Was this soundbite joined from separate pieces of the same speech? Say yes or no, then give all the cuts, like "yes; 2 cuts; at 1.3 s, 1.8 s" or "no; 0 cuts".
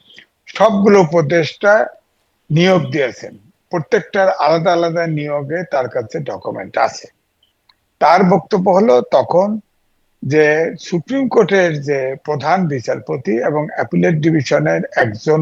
no; 0 cuts